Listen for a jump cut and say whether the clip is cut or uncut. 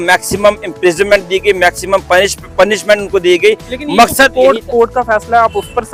uncut